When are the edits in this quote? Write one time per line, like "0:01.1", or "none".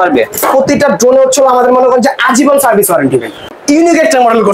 0:03.4